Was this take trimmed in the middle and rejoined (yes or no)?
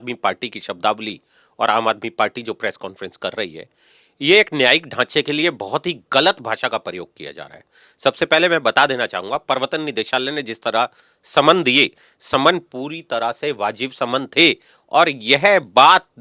no